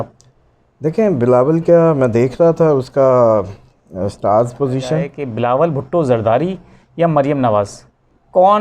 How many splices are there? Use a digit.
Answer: 1